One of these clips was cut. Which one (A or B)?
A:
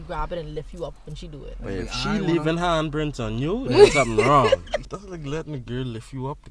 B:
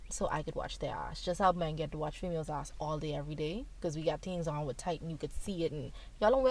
A